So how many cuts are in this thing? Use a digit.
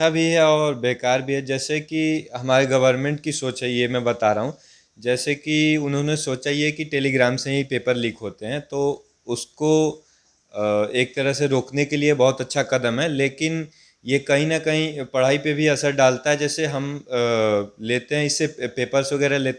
0